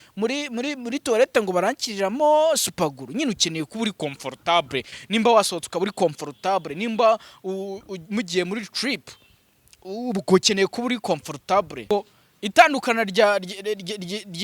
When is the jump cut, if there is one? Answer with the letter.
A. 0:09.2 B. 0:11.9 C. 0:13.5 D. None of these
B